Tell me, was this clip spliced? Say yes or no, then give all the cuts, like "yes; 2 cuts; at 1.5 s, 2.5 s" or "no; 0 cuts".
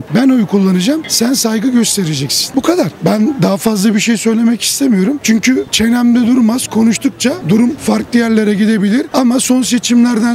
no; 0 cuts